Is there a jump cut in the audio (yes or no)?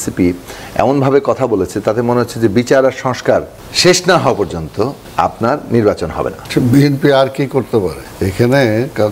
yes